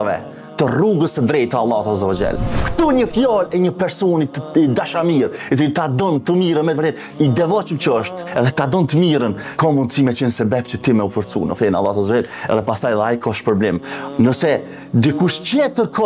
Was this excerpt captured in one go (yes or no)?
yes